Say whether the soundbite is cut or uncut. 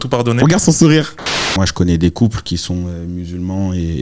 cut